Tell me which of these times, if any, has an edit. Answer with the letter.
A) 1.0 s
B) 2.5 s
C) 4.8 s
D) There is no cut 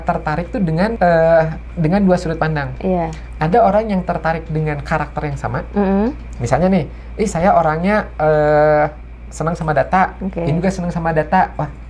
A